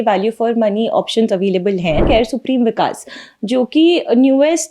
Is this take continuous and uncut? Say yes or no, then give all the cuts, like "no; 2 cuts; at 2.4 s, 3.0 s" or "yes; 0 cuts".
no; 1 cut; at 2.0 s